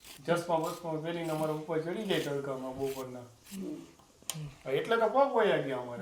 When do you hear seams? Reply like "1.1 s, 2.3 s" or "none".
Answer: none